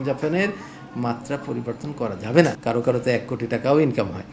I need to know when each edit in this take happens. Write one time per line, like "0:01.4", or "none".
0:02.6